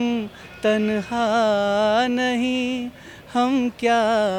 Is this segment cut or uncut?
uncut